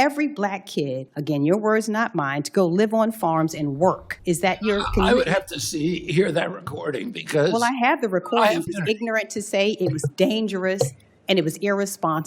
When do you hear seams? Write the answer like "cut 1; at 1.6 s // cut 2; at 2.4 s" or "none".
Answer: cut 1; at 1.1 s // cut 2; at 4.1 s // cut 3; at 8.7 s